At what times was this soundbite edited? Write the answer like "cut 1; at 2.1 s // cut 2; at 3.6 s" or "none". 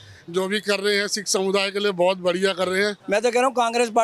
cut 1; at 3.0 s